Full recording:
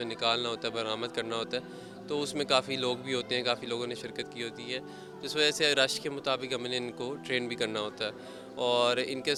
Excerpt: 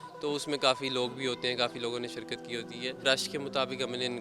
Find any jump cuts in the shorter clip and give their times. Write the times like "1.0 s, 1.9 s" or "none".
3.0 s